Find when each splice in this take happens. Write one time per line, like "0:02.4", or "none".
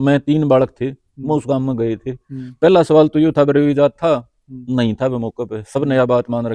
none